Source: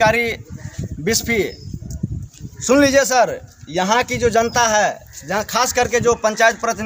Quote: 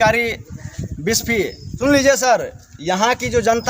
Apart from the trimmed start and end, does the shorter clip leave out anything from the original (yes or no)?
yes